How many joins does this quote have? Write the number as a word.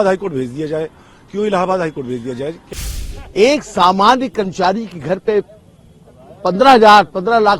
one